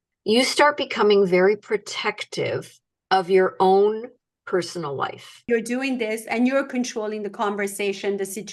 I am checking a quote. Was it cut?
yes; 1 cut; at 5.4 s

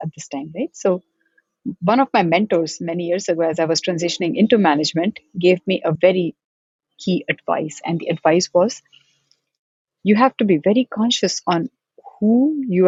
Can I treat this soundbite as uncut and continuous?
yes; 0 cuts

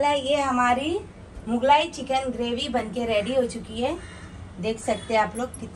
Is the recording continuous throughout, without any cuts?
yes; 0 cuts

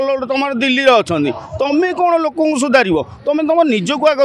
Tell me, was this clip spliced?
no; 0 cuts

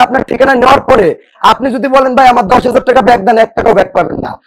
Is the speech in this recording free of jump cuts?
yes; 0 cuts

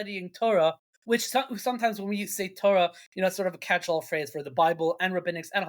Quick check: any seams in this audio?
yes; 1 cut; at 0.9 s

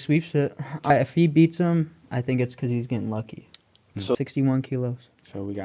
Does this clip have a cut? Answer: yes; 2 cuts; at 0.9 s, 4.2 s

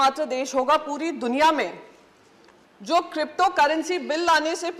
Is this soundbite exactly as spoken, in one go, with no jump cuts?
yes; 0 cuts

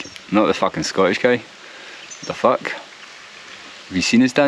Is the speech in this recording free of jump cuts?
yes; 0 cuts

